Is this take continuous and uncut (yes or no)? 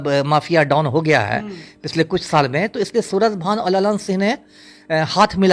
yes